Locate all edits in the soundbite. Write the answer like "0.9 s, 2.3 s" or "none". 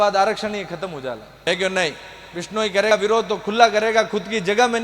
1.3 s